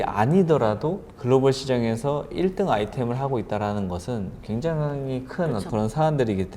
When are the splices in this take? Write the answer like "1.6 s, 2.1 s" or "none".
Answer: 1.1 s, 5.7 s